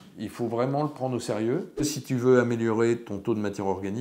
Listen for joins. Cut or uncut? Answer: cut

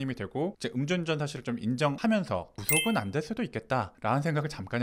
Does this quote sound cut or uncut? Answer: uncut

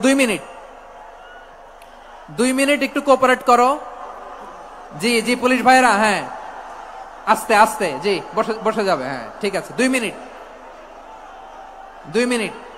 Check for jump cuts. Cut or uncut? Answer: uncut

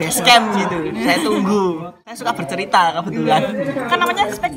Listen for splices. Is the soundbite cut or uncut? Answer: cut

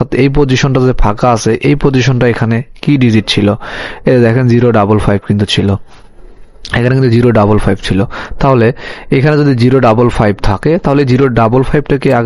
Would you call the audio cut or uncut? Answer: uncut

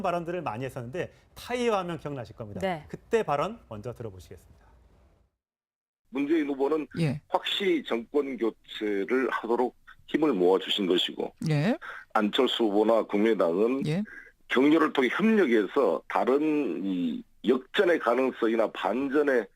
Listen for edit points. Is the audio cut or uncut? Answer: cut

